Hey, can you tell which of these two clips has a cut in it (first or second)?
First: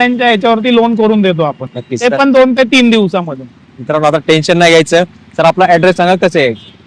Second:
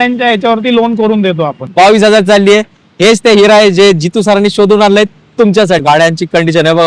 second